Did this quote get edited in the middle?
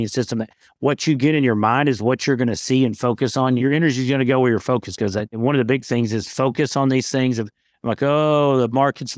yes; 2 cuts; at 3.6 s, 5.4 s

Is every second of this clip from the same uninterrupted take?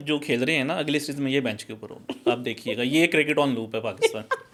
yes; 0 cuts

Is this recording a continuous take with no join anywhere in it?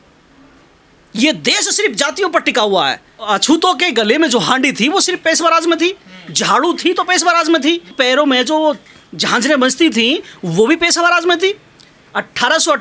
no; 1 cut; at 3.1 s

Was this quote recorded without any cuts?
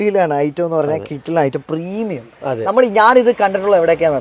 yes; 0 cuts

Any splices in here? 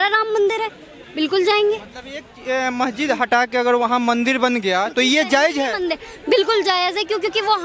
no; 0 cuts

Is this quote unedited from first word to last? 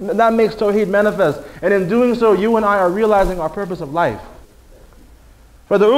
no; 1 cut; at 3.5 s

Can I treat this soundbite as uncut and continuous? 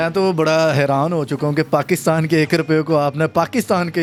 yes; 0 cuts

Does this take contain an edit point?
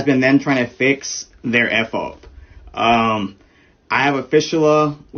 no; 0 cuts

